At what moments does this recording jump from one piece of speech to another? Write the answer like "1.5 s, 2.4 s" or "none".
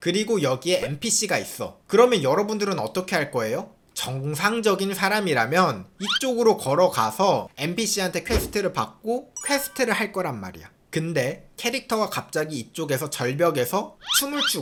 none